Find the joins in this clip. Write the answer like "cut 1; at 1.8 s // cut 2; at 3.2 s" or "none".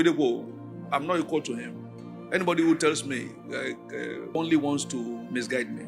cut 1; at 4.3 s